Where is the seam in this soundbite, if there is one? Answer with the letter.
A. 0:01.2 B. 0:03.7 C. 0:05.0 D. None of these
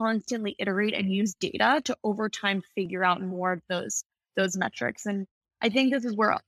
D